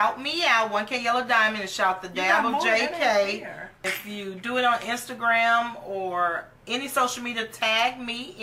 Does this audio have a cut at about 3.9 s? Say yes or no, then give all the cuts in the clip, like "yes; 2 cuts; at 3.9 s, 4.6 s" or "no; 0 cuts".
yes; 1 cut; at 3.9 s